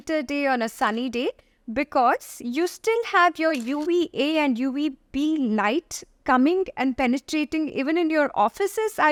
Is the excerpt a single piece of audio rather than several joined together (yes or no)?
yes